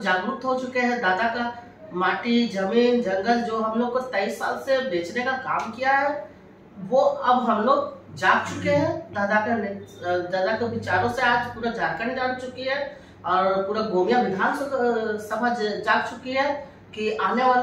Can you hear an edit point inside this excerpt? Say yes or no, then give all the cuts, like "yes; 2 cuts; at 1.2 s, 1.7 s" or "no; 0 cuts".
no; 0 cuts